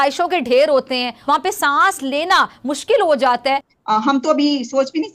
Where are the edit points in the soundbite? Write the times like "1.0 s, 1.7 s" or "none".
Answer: 1.1 s, 3.7 s